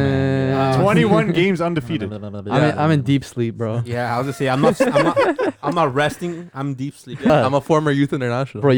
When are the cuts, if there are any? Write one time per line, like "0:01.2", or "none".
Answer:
0:07.3